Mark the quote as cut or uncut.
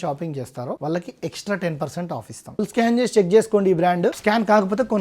cut